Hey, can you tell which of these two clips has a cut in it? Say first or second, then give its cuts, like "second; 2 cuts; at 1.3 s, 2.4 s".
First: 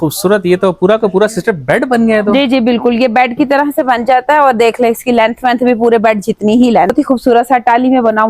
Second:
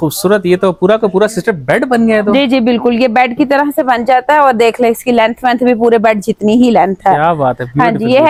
first; 1 cut; at 6.9 s